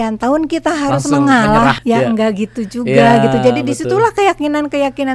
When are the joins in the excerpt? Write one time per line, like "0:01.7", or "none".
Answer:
0:01.8